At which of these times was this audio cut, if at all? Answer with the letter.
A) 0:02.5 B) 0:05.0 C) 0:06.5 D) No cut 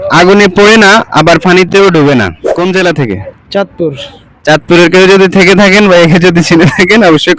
A